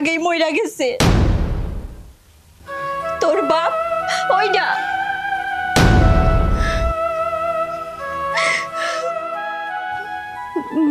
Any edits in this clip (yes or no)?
no